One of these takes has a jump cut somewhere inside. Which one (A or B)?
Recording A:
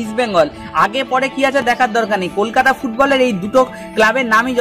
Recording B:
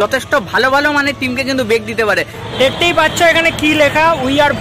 B